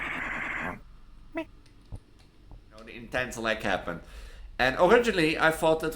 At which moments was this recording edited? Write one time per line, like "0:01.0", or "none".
0:03.0